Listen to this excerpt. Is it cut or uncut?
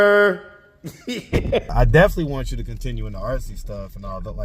cut